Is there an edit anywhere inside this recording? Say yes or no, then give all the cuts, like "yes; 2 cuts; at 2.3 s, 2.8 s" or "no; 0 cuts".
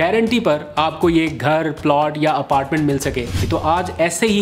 yes; 1 cut; at 3.3 s